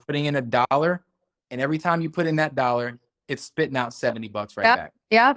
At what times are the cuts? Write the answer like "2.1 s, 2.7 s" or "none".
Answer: none